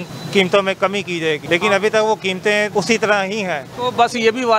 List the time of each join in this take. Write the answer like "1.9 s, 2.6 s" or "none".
1.4 s, 2.7 s, 3.7 s